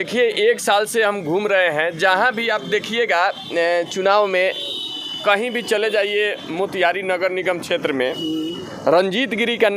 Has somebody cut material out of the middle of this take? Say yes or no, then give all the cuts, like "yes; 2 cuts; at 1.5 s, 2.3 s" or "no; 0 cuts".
no; 0 cuts